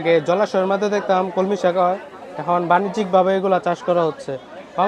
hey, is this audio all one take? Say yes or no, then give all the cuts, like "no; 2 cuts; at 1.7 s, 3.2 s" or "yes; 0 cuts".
yes; 0 cuts